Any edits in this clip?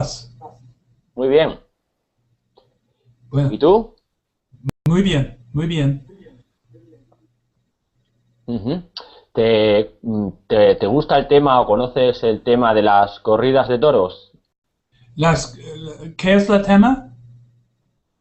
yes; 1 cut; at 8.5 s

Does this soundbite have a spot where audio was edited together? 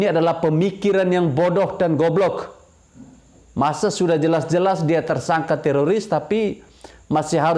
no; 0 cuts

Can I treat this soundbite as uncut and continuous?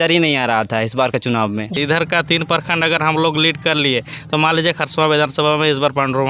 no; 1 cut; at 1.8 s

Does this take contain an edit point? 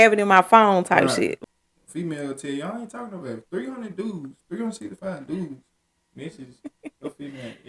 yes; 1 cut; at 1.4 s

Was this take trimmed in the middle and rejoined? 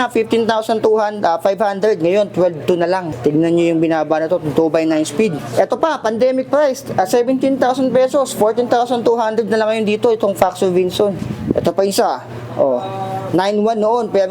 yes; 3 cuts; at 3.1 s, 5.4 s, 11.3 s

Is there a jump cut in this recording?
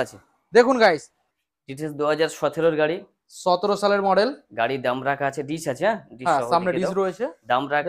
yes; 1 cut; at 1.1 s

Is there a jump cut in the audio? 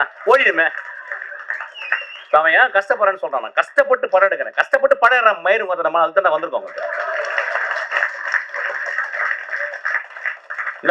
no; 0 cuts

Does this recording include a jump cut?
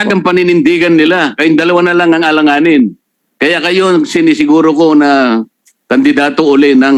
no; 0 cuts

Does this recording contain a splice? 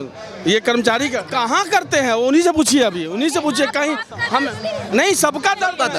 no; 0 cuts

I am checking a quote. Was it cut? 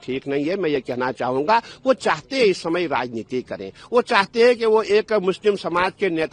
no; 0 cuts

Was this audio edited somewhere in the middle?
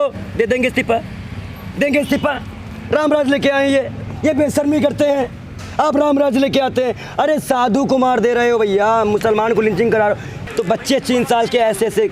yes; 1 cut; at 10.4 s

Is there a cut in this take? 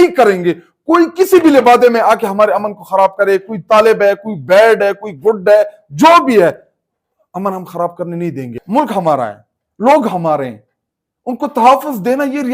yes; 1 cut; at 8.6 s

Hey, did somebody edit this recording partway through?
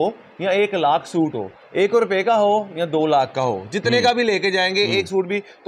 no; 0 cuts

